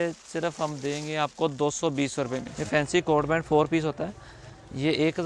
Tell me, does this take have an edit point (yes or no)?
yes